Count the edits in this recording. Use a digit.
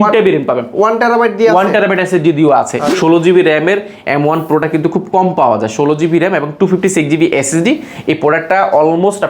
1